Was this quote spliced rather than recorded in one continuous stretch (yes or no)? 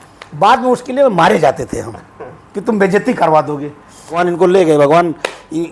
yes